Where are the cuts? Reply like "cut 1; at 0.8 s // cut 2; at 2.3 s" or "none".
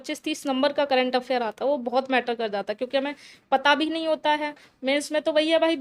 none